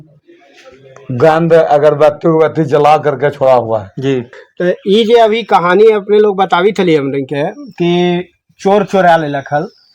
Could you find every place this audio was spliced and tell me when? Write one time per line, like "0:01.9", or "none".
0:04.4